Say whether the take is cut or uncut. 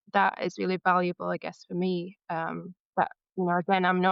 uncut